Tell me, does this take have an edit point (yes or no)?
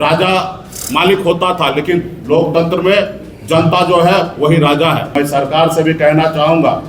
yes